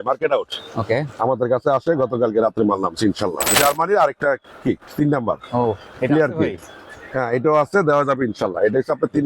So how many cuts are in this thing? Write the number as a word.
one